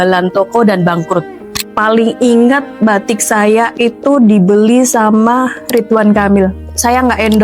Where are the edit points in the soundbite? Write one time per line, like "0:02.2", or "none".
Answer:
0:01.7

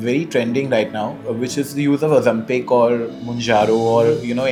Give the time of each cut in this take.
none

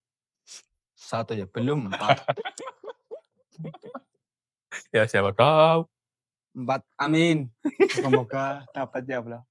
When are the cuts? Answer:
none

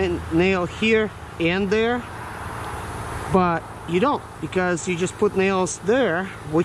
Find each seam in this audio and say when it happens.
none

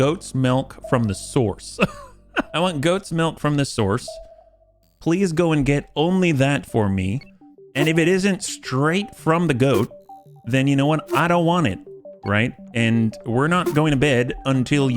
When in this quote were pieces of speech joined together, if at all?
0:02.5

